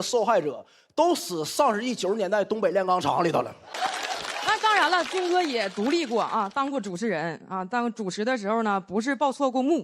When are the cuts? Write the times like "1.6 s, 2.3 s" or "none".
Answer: 3.7 s